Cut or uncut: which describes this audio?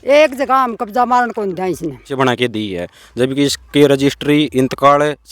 cut